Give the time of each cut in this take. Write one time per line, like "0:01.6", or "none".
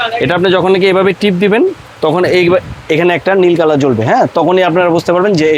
none